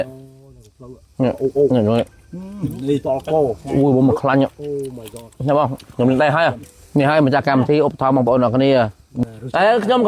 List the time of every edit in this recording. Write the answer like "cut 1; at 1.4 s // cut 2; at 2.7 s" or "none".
cut 1; at 6.7 s // cut 2; at 9.1 s